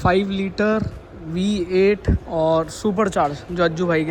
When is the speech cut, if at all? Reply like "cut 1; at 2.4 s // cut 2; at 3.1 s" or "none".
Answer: cut 1; at 2.2 s